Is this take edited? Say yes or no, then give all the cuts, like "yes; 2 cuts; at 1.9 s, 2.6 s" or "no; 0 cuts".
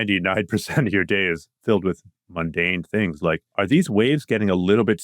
yes; 1 cut; at 3.5 s